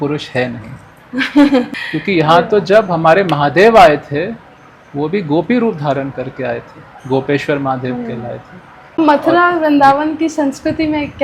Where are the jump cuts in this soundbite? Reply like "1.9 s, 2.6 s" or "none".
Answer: 1.8 s, 9.0 s